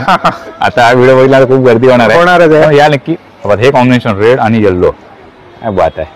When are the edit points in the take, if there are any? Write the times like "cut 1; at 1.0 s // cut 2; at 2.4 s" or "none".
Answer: none